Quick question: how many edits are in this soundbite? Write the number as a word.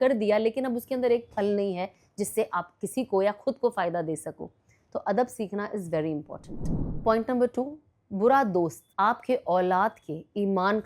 zero